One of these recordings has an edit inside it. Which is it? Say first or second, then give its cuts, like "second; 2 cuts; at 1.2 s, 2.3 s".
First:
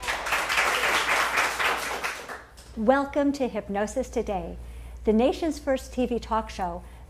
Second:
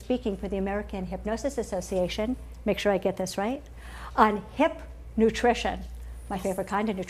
second; 1 cut; at 1.5 s